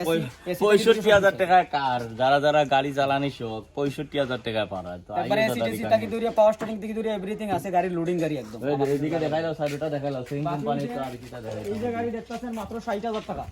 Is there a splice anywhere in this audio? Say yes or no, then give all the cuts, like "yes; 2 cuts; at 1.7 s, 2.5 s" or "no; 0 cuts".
no; 0 cuts